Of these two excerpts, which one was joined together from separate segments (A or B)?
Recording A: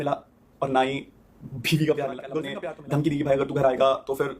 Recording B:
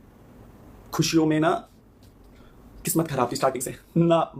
A